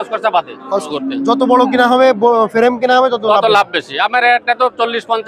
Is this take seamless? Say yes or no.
no